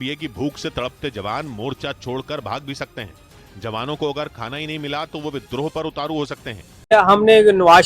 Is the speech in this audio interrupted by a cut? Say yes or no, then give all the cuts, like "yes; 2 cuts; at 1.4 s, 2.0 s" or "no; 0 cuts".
yes; 1 cut; at 6.9 s